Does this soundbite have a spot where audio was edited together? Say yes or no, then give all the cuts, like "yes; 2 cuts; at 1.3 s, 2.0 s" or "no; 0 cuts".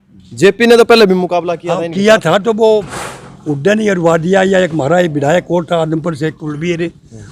no; 0 cuts